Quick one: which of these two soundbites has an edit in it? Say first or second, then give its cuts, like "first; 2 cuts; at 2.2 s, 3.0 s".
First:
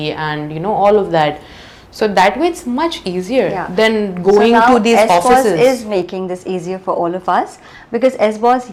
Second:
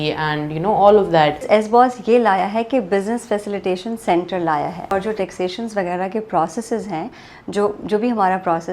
second; 2 cuts; at 1.4 s, 4.9 s